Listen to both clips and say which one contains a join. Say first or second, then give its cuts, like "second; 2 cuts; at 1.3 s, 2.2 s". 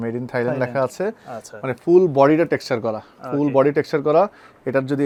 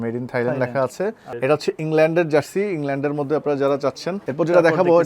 second; 2 cuts; at 1.3 s, 4.2 s